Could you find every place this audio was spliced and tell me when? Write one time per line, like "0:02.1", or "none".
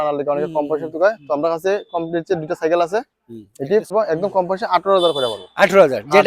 0:03.9